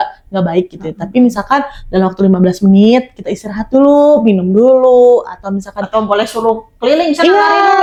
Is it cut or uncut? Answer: uncut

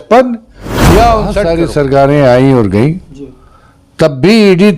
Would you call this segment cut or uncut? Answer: cut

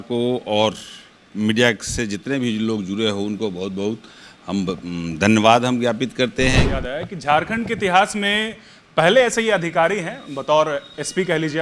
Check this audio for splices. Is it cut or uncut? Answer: cut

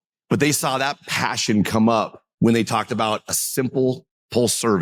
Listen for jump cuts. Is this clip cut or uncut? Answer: uncut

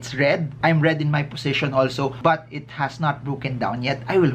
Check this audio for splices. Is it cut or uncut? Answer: uncut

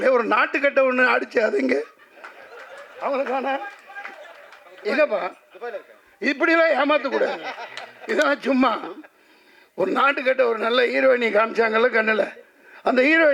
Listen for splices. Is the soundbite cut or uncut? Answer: uncut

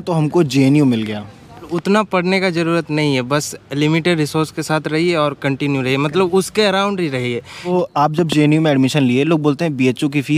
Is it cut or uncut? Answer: cut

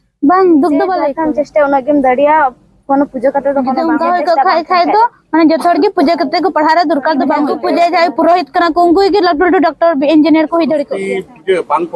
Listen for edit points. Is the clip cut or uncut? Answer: cut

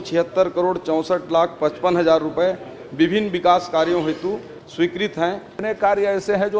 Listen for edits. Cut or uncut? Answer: cut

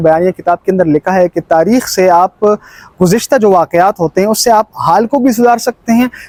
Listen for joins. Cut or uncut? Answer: uncut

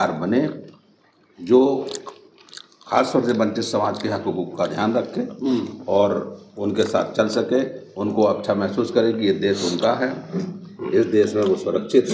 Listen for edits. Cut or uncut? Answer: uncut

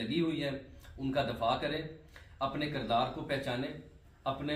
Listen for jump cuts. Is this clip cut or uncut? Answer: uncut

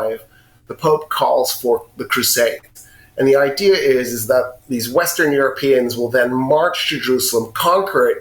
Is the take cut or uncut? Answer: uncut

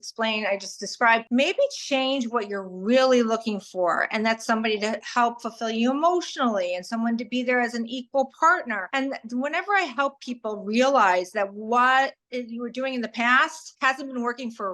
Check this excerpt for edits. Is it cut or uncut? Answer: cut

